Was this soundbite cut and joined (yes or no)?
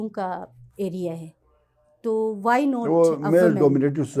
no